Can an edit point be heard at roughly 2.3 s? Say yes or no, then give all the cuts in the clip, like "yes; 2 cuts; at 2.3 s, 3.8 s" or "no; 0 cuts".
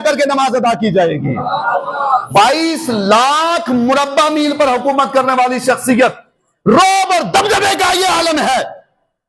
yes; 1 cut; at 2.3 s